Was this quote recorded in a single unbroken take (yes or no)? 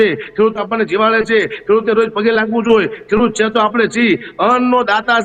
yes